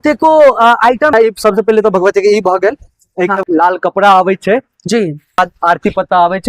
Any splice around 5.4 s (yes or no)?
yes